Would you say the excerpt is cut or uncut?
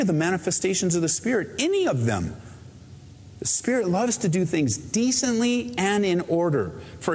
uncut